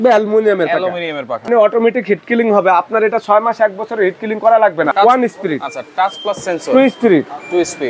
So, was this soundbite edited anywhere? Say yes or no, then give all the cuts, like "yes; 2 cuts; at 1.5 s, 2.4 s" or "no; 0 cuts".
yes; 2 cuts; at 1.5 s, 4.9 s